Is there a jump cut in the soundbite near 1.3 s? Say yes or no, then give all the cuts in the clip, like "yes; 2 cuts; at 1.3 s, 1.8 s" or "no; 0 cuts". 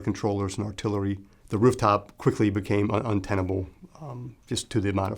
yes; 1 cut; at 1.3 s